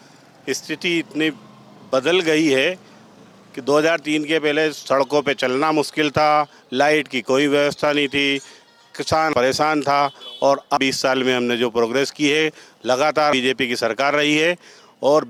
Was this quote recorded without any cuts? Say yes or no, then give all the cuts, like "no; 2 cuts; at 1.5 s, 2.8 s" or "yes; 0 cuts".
yes; 0 cuts